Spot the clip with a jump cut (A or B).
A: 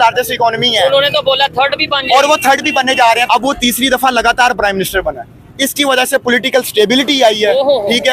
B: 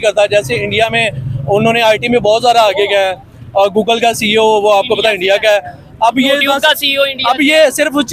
A